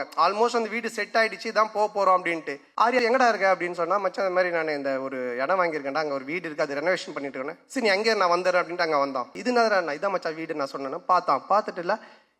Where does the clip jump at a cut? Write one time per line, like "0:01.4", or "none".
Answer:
0:02.8
0:09.4